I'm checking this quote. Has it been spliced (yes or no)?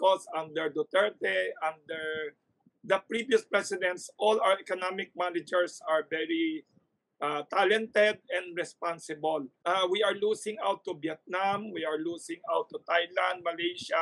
yes